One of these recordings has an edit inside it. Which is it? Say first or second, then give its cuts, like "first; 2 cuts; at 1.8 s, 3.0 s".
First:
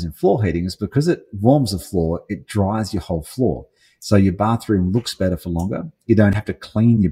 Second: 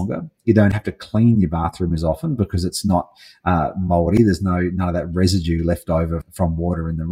second; 1 cut; at 6.2 s